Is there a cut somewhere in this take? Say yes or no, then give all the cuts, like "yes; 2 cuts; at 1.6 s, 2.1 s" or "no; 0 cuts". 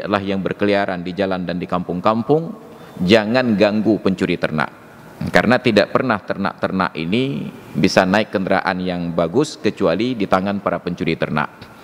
no; 0 cuts